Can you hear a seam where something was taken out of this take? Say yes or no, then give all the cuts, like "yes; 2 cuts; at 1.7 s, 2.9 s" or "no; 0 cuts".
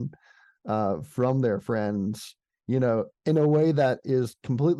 no; 0 cuts